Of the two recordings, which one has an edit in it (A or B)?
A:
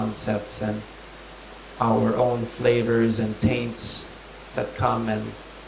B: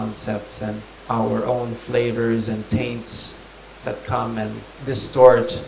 B